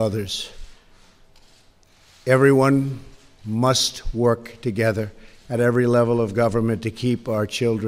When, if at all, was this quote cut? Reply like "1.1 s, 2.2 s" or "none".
3.0 s